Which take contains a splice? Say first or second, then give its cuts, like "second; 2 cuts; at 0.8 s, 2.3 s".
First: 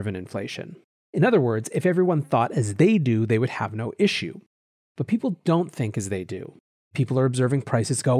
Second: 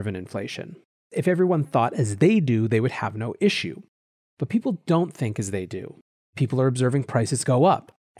second; 1 cut; at 1.1 s